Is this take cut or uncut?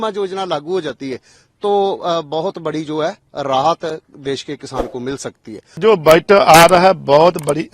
cut